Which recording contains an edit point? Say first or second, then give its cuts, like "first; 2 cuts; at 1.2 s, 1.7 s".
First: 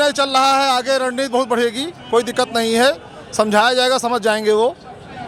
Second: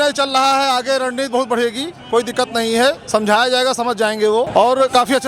second; 2 cuts; at 3.0 s, 4.5 s